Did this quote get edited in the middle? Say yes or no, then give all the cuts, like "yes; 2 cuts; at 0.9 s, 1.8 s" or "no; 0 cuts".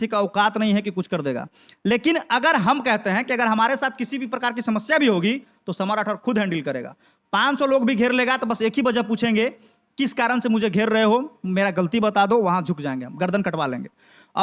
no; 0 cuts